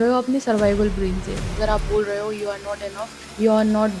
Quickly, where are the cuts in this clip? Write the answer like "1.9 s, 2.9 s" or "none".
1.3 s